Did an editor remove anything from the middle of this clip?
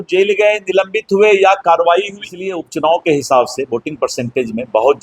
yes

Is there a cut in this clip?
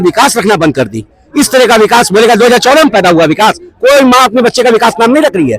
no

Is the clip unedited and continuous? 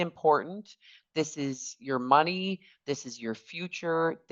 yes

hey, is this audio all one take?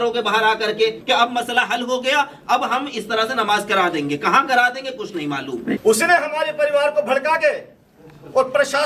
no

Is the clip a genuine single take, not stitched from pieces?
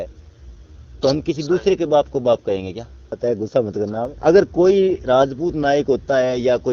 no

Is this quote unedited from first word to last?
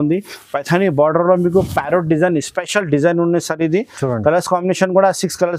yes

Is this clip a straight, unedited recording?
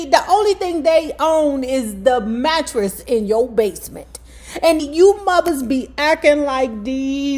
no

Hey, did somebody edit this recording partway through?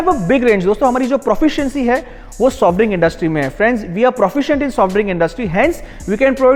no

